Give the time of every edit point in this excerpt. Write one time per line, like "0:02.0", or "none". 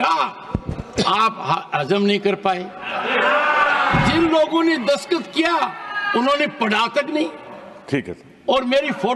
0:04.0